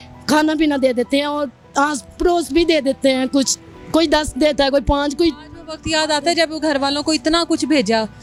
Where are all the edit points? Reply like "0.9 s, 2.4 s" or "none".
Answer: none